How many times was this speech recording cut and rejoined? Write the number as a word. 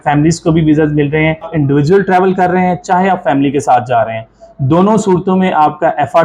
one